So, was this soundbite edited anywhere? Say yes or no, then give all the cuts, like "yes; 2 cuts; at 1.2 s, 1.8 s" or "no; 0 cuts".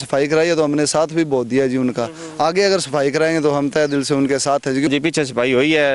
yes; 1 cut; at 4.9 s